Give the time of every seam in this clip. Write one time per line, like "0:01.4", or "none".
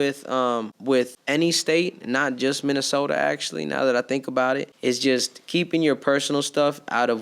0:01.0
0:04.7